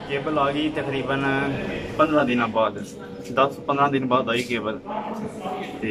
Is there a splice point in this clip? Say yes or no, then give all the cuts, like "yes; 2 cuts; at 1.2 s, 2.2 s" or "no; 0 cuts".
no; 0 cuts